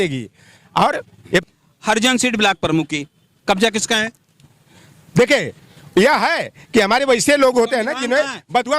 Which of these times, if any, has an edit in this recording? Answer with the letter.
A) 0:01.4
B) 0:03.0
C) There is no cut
A